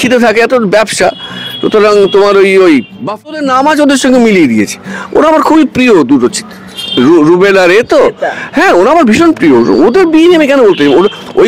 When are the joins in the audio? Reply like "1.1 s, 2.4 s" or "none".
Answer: 3.5 s